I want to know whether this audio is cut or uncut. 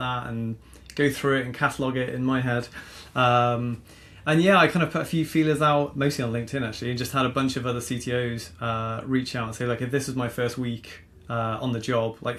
uncut